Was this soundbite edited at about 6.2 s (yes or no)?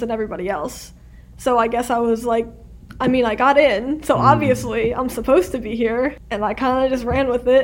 yes